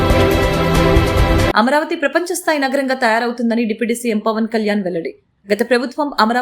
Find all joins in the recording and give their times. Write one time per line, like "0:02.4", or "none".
0:01.5